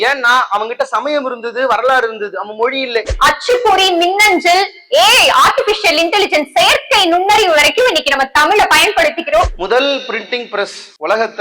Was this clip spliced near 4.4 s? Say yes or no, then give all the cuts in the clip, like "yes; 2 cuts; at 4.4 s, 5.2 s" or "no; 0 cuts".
no; 2 cuts; at 3.1 s, 9.5 s